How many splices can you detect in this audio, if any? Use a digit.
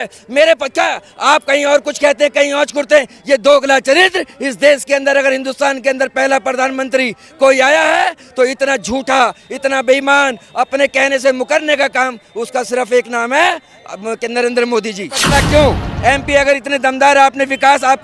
1